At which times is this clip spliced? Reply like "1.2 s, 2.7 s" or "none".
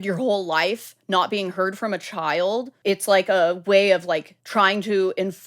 4.4 s